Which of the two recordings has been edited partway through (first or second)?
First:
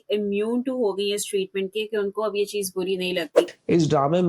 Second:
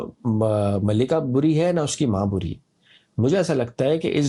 first